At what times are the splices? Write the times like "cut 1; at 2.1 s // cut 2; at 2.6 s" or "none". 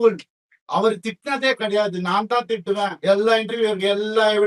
none